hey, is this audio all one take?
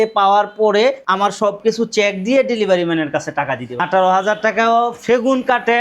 no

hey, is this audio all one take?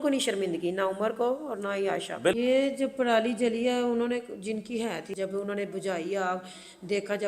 no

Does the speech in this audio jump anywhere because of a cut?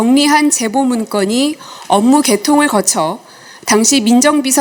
no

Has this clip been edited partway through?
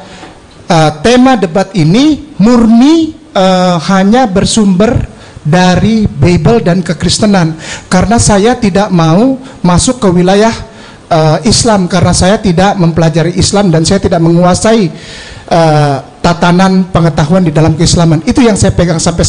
no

